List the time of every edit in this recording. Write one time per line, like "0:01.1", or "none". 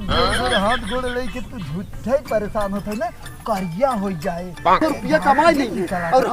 0:04.8